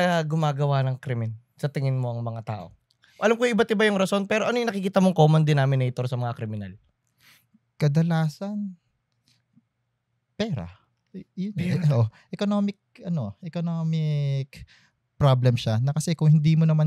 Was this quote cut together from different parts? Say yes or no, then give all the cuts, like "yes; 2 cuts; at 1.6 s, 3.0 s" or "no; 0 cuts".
no; 0 cuts